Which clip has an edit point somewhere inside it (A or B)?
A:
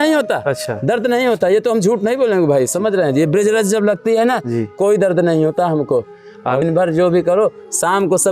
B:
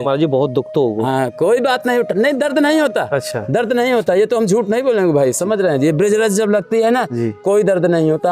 A